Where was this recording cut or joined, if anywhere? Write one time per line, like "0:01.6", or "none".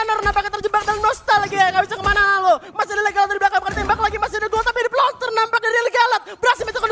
none